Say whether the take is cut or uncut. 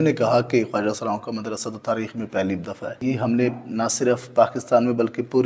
cut